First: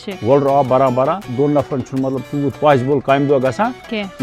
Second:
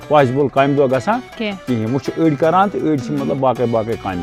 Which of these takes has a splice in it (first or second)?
first